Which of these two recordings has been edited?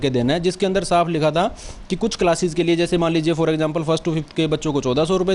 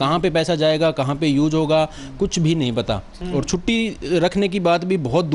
second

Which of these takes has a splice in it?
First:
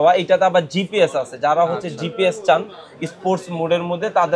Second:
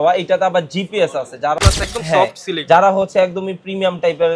second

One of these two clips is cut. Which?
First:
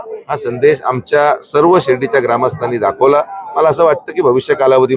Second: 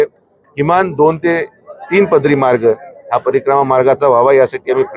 first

